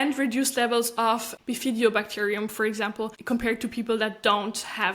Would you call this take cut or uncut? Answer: cut